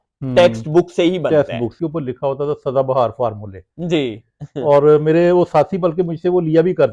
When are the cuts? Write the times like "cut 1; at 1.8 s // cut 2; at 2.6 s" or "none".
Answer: cut 1; at 1.7 s